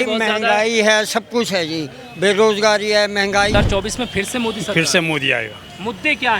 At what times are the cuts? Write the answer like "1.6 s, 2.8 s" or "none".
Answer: 3.5 s